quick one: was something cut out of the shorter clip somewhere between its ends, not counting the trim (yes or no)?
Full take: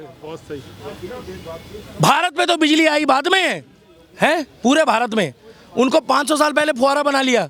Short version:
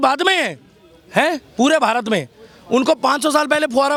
no